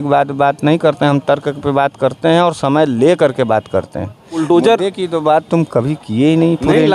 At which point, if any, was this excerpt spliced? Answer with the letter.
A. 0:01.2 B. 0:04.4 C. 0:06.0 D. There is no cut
B